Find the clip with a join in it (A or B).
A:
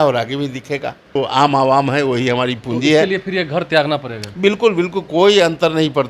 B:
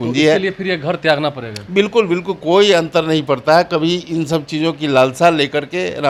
A